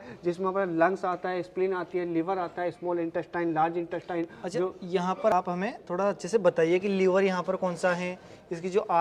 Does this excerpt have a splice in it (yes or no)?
no